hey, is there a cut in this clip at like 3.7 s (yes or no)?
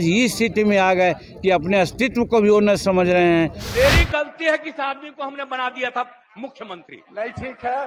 yes